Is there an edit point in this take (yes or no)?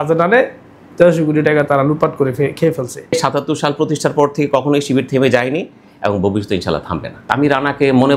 yes